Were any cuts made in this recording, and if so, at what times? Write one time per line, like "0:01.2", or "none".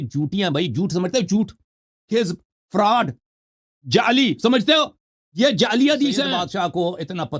0:06.4